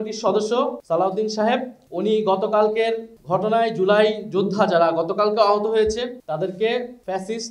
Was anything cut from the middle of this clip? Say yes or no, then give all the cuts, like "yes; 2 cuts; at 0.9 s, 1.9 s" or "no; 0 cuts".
no; 0 cuts